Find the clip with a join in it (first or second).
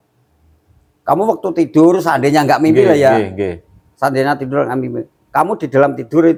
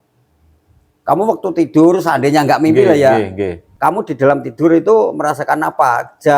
second